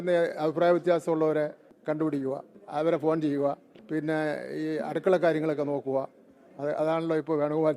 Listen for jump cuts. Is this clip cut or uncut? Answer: cut